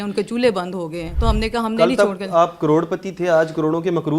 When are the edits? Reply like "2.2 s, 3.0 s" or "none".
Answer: 1.0 s